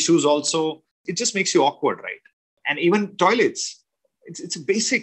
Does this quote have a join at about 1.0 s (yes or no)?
yes